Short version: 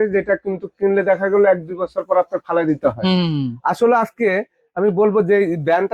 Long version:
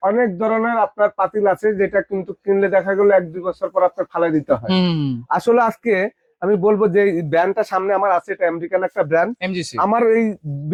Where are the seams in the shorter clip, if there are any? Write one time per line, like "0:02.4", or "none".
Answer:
none